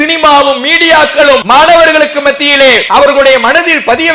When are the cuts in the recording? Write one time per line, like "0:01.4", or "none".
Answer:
0:01.4
0:02.8

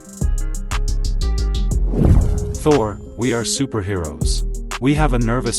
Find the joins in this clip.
0:02.5

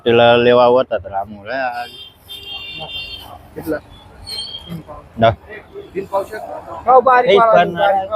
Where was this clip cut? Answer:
none

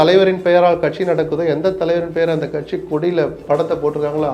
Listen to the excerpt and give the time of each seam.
0:03.4

